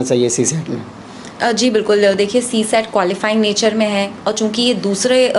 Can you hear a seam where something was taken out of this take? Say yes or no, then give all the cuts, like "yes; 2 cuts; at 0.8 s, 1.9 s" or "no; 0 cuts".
no; 0 cuts